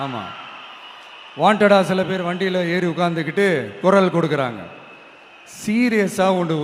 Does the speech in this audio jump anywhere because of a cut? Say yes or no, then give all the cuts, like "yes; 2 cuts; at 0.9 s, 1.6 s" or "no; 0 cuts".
no; 0 cuts